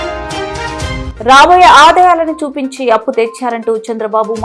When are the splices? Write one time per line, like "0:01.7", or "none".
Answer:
0:01.1

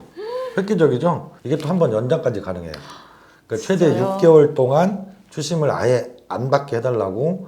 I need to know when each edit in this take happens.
0:01.3

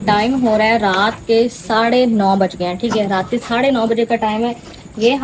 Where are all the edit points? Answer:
none

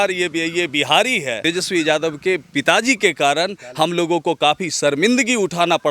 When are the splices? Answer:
0:01.4

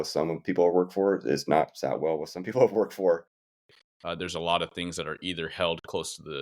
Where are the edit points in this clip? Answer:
0:03.6

